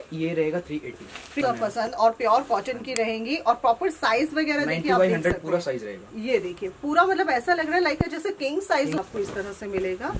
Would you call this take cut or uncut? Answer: cut